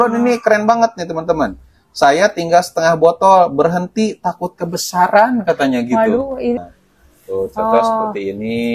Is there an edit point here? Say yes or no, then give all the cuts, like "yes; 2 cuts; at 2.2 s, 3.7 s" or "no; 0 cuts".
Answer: yes; 1 cut; at 6.7 s